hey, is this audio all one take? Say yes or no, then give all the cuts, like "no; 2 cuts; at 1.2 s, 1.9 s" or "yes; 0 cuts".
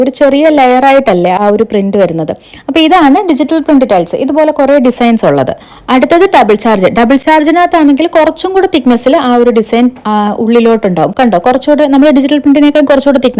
yes; 0 cuts